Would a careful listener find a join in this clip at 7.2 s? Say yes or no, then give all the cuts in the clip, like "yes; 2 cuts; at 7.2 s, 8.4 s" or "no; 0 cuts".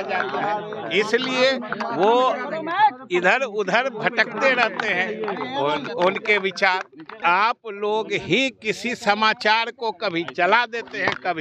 yes; 1 cut; at 7.2 s